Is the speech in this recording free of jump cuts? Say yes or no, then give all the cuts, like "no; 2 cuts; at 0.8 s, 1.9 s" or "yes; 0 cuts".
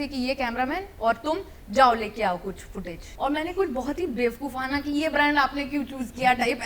no; 1 cut; at 3.0 s